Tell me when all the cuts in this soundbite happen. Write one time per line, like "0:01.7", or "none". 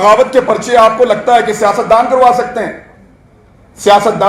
none

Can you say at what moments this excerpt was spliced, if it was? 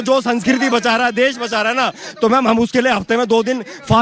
none

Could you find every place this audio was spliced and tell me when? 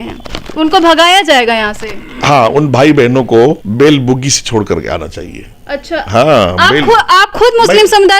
0:03.7

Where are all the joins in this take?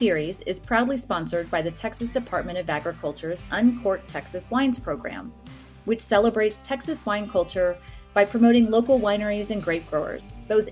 none

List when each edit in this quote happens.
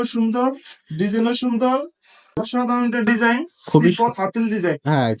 0:02.4

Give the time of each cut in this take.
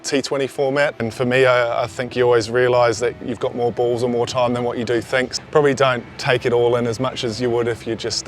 0:01.0
0:05.3

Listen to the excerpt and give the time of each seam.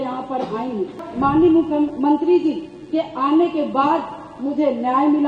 0:01.1

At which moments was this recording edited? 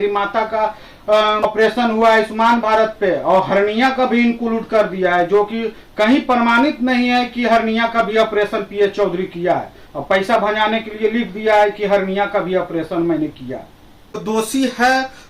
0:01.5
0:14.2

